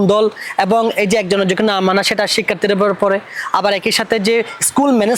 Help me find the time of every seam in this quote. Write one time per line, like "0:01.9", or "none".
none